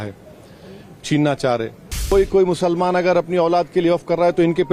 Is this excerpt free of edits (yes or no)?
no